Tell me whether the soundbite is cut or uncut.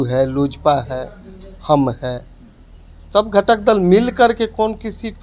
uncut